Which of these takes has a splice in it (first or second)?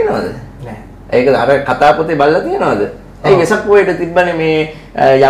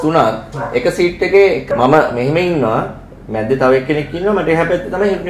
second